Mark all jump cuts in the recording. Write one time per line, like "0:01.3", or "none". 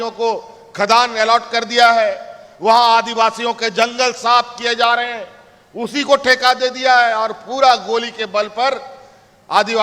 none

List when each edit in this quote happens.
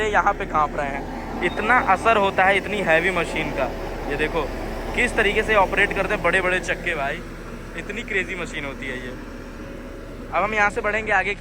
none

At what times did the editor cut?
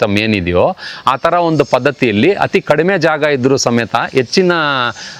none

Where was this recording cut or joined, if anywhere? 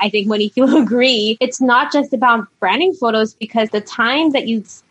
0:01.3
0:03.6

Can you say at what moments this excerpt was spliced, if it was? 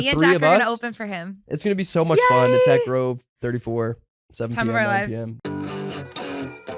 0:05.3

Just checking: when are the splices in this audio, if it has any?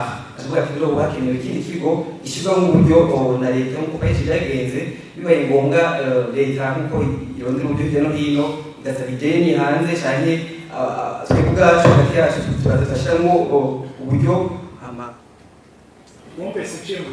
none

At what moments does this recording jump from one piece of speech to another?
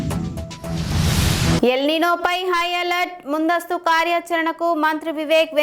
0:01.6

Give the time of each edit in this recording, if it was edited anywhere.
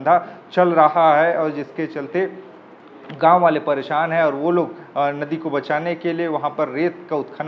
none

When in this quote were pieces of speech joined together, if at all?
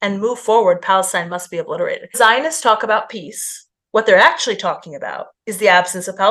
0:02.1

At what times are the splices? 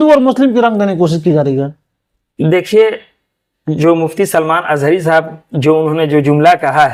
none

